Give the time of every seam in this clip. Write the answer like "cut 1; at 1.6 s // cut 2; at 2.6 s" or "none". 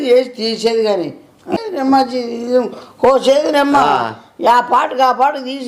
cut 1; at 1.4 s